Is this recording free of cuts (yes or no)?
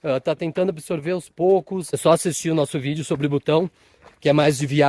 no